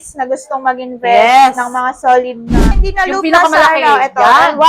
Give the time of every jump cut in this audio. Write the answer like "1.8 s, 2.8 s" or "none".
2.8 s

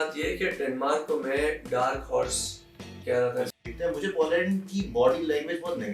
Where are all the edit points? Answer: 3.5 s

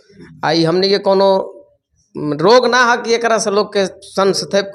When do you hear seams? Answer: none

